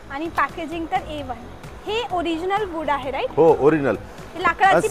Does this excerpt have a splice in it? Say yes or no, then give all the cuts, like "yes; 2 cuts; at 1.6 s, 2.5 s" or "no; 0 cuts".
no; 0 cuts